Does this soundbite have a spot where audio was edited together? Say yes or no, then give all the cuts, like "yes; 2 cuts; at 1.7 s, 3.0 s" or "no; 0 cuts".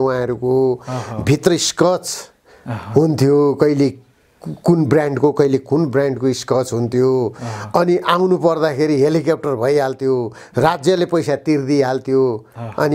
no; 0 cuts